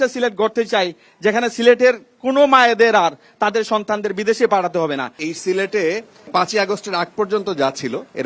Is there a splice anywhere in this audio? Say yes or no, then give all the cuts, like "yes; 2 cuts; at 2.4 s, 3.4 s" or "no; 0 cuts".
yes; 2 cuts; at 5.3 s, 6.3 s